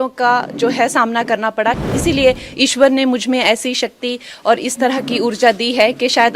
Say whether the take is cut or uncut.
cut